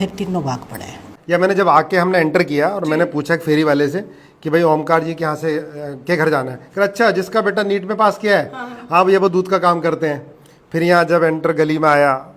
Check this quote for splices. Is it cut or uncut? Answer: cut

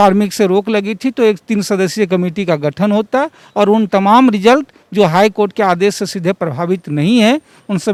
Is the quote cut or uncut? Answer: uncut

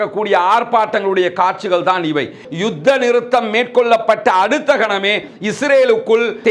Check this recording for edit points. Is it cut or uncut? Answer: cut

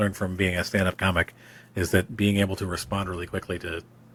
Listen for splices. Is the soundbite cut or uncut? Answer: uncut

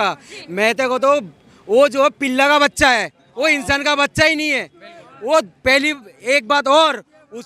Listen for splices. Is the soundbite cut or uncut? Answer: uncut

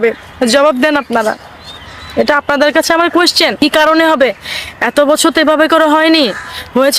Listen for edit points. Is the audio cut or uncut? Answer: cut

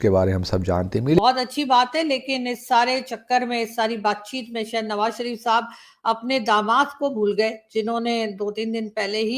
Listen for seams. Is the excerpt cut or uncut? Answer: cut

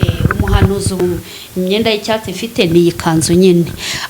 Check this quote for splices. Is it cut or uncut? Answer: cut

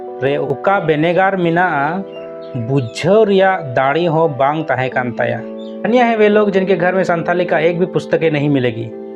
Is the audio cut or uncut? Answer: cut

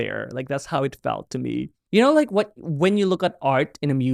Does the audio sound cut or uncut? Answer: cut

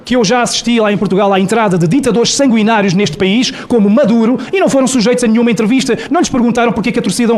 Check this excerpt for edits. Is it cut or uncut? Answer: uncut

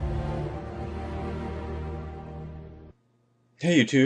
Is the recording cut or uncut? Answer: uncut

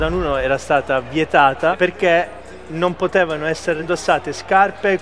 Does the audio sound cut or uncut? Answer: cut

